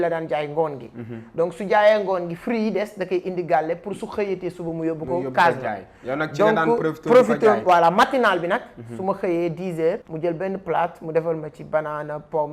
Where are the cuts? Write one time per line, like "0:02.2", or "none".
0:10.1